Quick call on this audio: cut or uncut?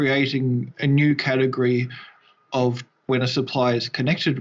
cut